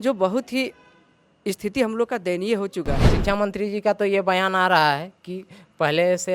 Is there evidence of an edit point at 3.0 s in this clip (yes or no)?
yes